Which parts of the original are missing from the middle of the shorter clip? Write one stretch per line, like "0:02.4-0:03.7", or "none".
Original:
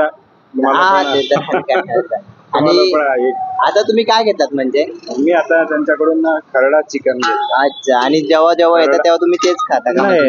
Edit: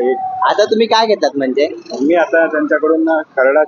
none